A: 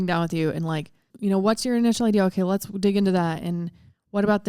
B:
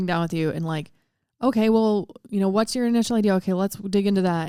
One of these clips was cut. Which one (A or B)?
A